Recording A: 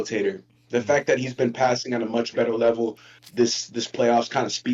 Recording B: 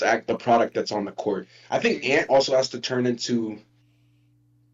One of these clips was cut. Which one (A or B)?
B